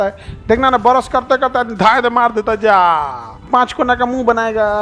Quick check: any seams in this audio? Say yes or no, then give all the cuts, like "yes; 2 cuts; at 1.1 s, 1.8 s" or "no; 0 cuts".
yes; 1 cut; at 3.2 s